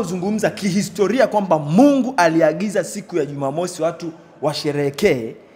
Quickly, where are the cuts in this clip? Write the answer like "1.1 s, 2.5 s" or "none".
none